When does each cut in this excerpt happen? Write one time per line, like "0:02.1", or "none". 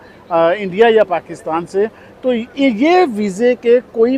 none